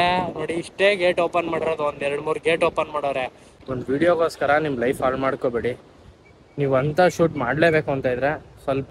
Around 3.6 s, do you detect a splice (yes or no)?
yes